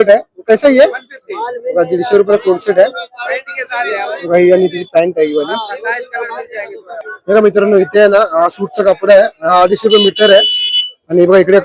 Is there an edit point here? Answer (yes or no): yes